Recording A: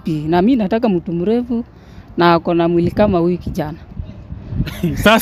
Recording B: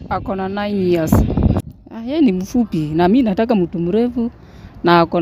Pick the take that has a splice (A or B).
B